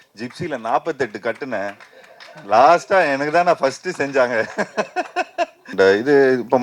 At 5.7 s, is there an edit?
yes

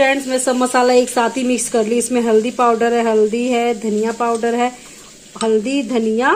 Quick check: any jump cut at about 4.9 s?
no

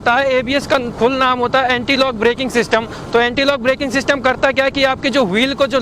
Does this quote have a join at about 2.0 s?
no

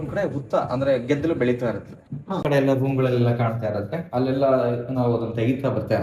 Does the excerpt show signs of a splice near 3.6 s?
no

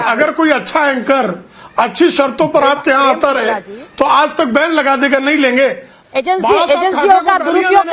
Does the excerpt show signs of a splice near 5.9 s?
yes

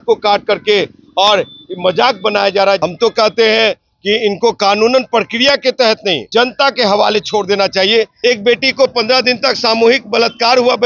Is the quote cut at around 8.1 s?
yes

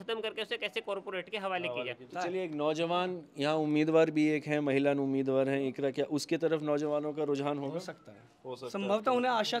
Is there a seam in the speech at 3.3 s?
no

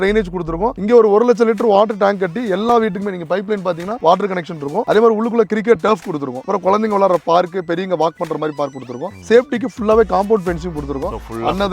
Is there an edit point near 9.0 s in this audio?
yes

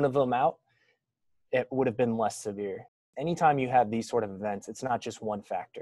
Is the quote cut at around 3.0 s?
yes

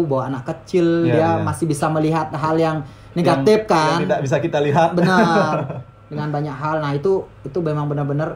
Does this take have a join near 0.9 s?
no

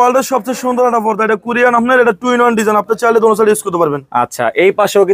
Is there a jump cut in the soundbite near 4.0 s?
no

